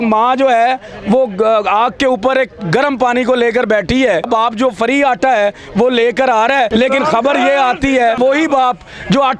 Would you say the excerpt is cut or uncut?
cut